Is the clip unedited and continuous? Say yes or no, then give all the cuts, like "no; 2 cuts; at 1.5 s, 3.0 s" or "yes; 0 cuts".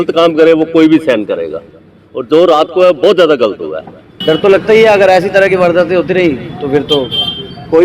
no; 1 cut; at 4.1 s